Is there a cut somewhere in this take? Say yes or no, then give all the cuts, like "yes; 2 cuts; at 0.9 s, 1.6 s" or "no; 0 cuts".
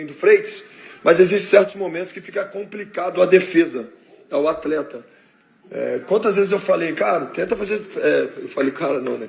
yes; 1 cut; at 8.2 s